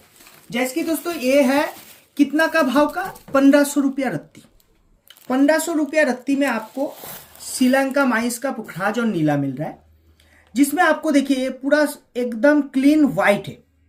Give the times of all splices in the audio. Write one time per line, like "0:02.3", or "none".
none